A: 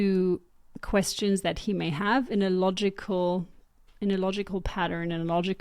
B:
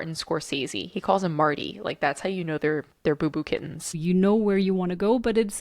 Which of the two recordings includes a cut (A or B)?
B